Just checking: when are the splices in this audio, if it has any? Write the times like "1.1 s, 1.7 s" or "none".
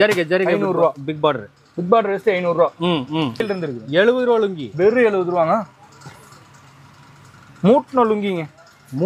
3.4 s